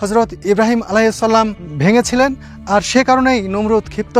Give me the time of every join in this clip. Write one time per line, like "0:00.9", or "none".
0:01.6